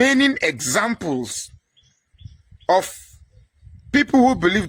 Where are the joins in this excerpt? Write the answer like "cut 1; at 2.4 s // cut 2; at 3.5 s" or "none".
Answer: none